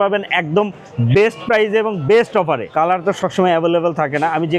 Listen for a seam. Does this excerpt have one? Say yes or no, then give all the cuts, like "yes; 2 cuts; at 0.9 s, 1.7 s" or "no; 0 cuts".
yes; 1 cut; at 2.7 s